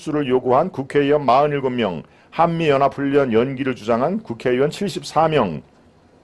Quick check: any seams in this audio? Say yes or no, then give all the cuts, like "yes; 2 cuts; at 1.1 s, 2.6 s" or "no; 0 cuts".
no; 0 cuts